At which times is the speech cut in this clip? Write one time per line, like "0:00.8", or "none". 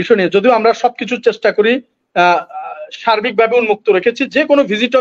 none